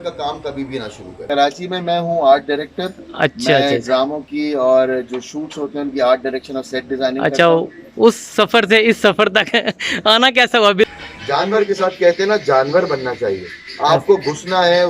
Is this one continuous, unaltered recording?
no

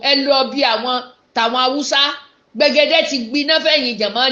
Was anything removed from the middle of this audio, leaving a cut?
no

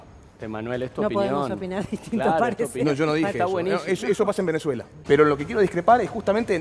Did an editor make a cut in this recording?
yes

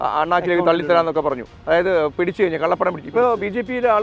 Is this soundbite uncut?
yes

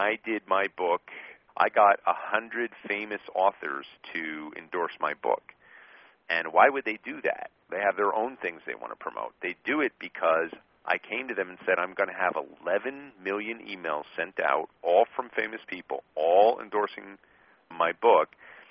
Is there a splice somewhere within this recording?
yes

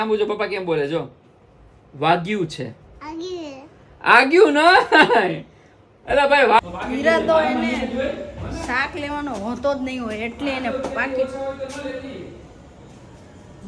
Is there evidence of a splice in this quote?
yes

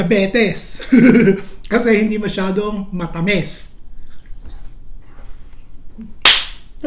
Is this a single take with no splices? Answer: yes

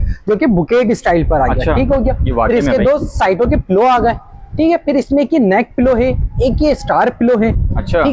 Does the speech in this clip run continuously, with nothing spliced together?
yes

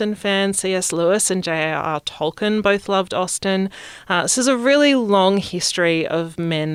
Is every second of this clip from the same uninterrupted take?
yes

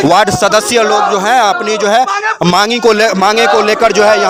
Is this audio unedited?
yes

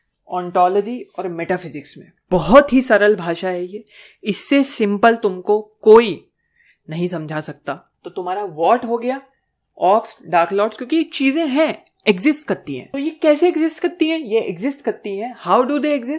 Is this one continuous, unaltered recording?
no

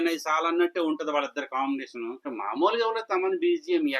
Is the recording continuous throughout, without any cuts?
no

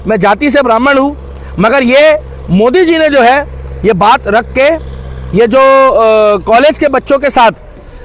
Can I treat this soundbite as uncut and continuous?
yes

